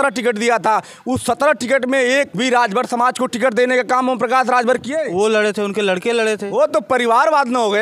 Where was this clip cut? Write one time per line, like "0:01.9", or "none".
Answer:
none